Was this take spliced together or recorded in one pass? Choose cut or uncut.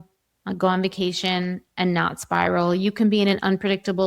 uncut